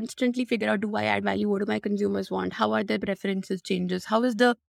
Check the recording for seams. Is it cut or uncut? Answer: uncut